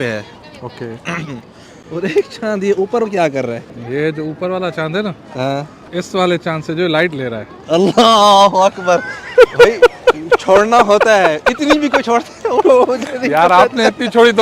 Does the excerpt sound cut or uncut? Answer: uncut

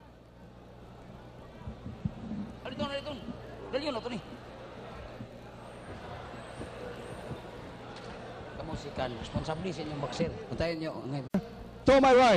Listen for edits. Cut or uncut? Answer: uncut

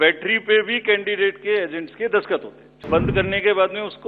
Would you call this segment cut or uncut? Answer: cut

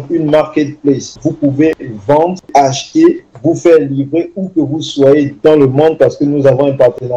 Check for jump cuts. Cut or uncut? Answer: cut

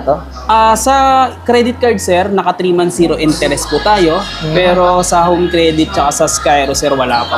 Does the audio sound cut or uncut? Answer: uncut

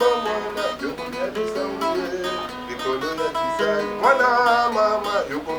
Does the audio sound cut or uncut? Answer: uncut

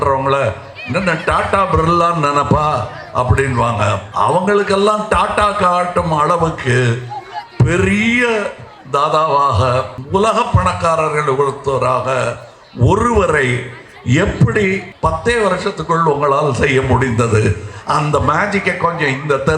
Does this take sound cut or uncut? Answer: cut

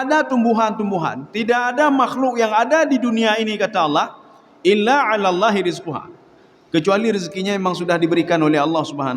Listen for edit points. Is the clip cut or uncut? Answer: uncut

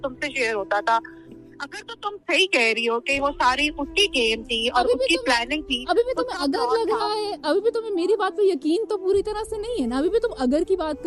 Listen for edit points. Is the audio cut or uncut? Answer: cut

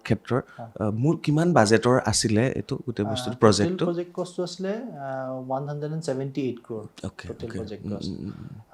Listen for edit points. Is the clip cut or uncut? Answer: uncut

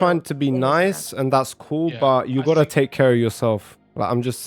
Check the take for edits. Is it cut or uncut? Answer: uncut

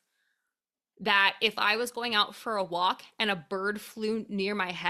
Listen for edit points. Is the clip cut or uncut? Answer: uncut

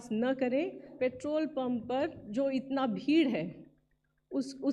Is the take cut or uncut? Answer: cut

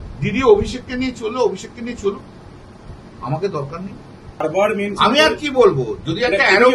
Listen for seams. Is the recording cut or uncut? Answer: cut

